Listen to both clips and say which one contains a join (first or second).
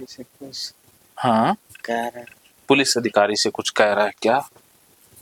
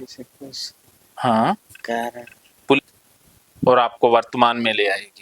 second